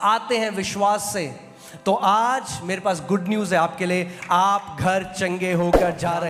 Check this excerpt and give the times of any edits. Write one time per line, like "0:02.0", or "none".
none